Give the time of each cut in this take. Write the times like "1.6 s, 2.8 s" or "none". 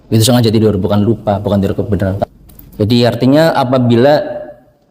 2.2 s